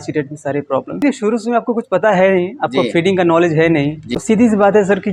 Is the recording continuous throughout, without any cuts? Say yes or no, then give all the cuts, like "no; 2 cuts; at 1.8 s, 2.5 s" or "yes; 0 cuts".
no; 2 cuts; at 1.0 s, 4.0 s